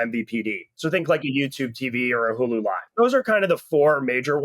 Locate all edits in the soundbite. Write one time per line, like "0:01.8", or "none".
0:02.8